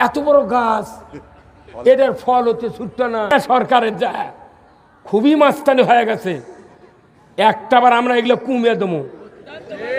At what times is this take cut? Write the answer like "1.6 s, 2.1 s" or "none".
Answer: 3.3 s